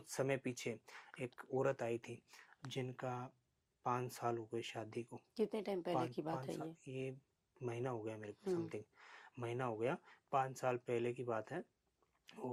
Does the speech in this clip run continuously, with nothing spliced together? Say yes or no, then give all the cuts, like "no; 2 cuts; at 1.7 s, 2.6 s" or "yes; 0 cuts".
yes; 0 cuts